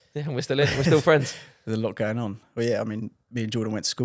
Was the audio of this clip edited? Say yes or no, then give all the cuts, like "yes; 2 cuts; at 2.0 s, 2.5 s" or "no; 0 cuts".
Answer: no; 0 cuts